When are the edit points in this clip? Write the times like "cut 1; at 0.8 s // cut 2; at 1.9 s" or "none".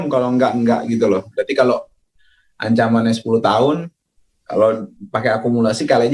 cut 1; at 1.3 s